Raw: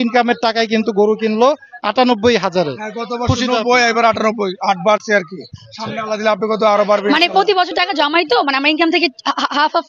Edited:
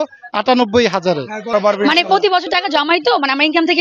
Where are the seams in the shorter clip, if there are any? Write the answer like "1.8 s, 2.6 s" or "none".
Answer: 1.5 s